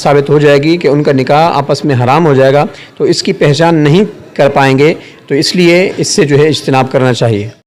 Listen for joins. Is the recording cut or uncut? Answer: uncut